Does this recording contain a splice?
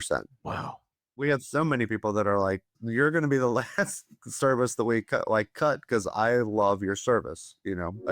yes; 2 cuts; at 1.2 s, 2.7 s

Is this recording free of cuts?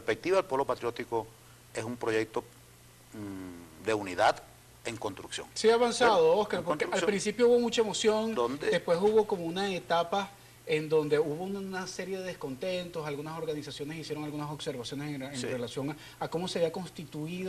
yes; 0 cuts

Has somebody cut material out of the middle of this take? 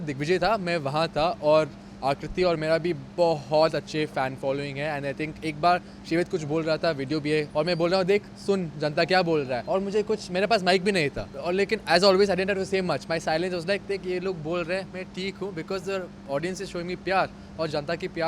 yes; 3 cuts; at 7.5 s, 9.6 s, 11.3 s

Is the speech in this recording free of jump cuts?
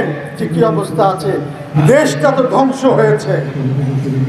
no; 1 cut; at 1.6 s

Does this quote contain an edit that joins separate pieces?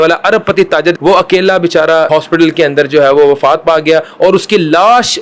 yes; 2 cuts; at 1.0 s, 2.2 s

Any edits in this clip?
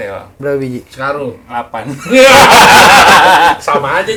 no; 0 cuts

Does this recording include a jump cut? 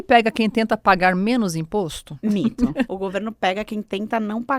yes; 2 cuts; at 2.0 s, 2.9 s

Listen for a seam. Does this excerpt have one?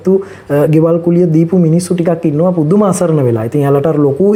no; 0 cuts

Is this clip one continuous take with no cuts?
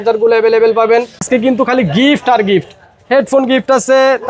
no; 1 cut; at 1.2 s

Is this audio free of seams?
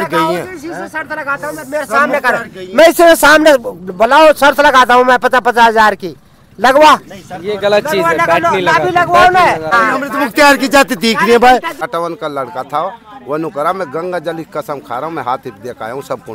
no; 2 cuts; at 9.8 s, 11.9 s

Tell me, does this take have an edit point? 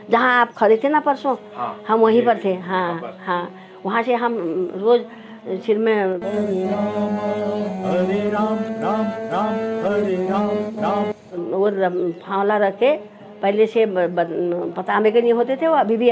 no; 0 cuts

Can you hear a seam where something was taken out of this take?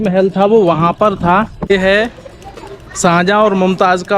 yes; 1 cut; at 1.7 s

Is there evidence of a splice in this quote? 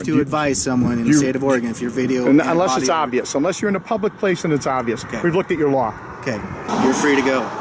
yes; 1 cut; at 6.7 s

